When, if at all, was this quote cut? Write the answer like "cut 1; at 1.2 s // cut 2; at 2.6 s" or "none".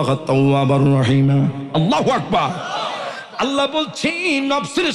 none